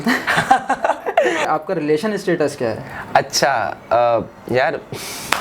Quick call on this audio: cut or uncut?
cut